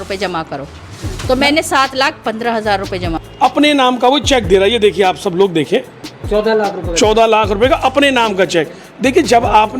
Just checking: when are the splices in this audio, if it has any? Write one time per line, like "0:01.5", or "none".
0:03.2